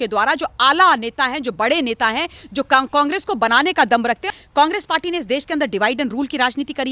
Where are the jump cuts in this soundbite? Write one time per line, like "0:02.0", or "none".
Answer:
0:04.3